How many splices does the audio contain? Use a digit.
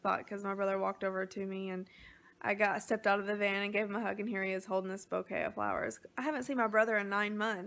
0